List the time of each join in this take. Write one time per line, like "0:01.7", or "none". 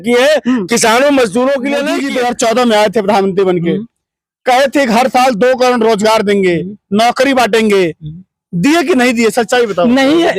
0:02.0

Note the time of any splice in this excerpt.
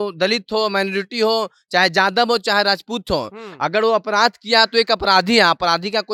none

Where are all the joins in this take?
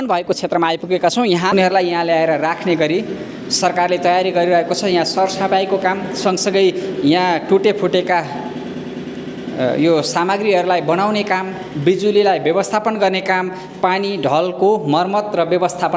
0:01.5

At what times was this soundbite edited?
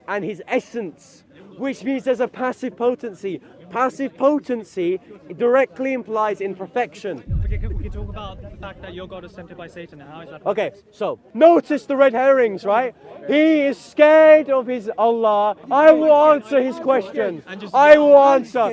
0:11.2
0:15.6

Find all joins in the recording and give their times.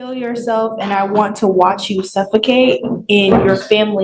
none

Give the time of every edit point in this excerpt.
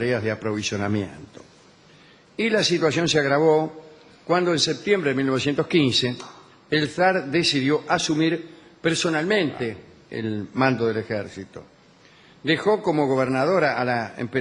none

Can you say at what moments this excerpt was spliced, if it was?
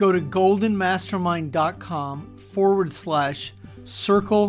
none

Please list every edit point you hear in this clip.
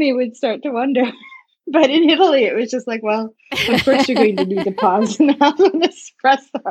none

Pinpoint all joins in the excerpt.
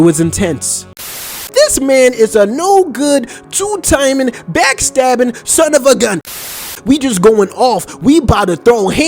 0:01.4
0:06.4

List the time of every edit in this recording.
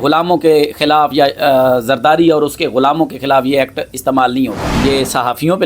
0:04.7

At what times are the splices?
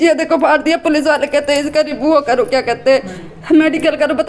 none

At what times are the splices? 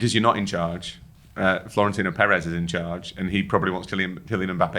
none

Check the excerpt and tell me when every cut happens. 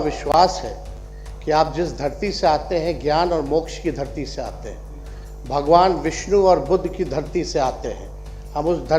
none

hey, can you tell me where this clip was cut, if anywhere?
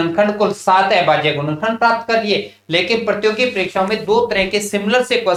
none

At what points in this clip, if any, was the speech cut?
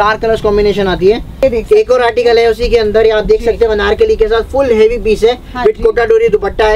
0:01.4

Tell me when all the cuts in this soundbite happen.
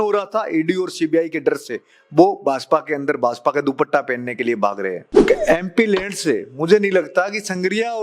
0:05.1

